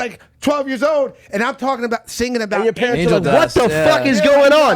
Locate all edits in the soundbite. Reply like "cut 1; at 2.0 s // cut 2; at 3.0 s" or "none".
none